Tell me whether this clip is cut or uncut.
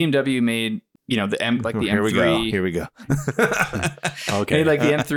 cut